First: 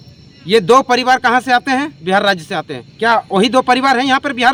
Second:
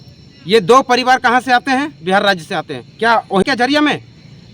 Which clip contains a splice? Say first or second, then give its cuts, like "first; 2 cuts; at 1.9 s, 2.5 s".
second; 1 cut; at 3.4 s